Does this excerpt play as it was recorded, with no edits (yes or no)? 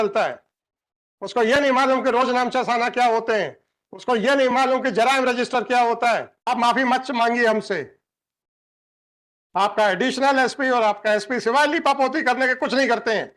no